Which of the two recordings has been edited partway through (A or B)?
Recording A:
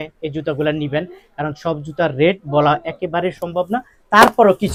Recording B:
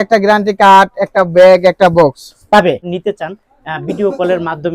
B